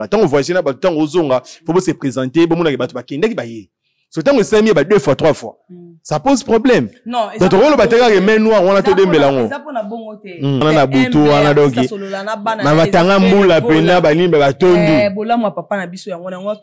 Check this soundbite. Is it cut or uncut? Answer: cut